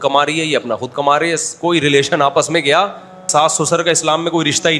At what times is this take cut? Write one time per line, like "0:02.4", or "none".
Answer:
0:03.3